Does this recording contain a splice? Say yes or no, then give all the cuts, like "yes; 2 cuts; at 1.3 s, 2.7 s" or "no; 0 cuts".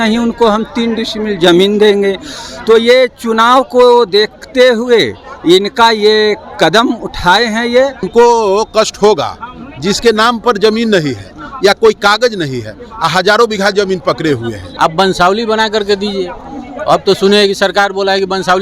yes; 2 cuts; at 8.1 s, 14.6 s